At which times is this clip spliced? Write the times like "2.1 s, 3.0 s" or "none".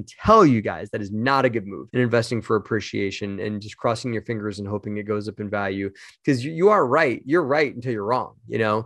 none